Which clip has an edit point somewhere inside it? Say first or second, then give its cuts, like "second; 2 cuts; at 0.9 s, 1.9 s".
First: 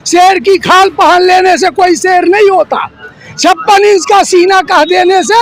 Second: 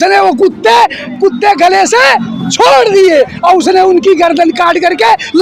second; 1 cut; at 1.0 s